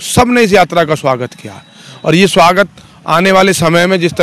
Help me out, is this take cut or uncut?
uncut